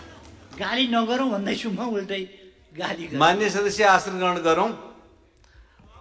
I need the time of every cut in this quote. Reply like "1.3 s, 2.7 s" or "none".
none